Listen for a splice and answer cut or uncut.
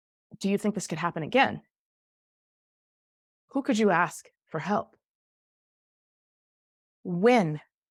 uncut